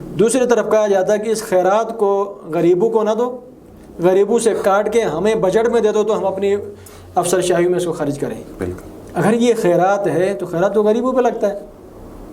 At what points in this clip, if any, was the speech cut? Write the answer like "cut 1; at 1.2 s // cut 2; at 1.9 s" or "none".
none